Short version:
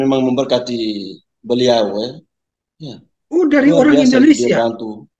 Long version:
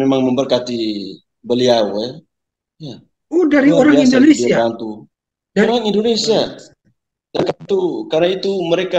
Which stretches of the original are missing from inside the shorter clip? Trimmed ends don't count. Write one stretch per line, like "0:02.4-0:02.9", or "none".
none